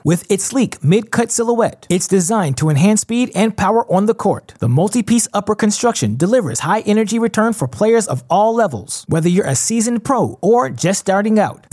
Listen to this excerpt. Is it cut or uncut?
uncut